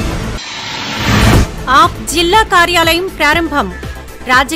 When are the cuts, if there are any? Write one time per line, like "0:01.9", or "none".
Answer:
none